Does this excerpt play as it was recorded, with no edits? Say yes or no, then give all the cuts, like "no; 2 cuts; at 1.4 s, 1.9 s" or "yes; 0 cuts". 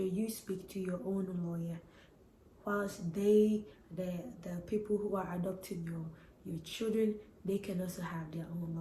yes; 0 cuts